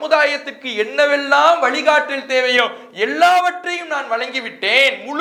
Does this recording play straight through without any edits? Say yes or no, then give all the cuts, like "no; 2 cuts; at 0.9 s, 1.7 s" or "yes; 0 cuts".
yes; 0 cuts